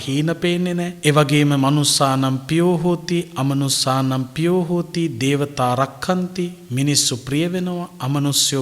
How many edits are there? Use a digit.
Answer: 1